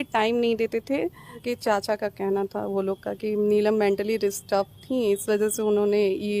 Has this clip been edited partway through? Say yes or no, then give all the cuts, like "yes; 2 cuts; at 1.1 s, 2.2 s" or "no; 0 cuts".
yes; 1 cut; at 1.4 s